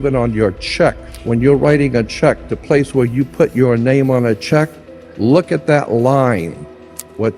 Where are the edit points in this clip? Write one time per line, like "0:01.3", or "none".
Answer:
0:01.1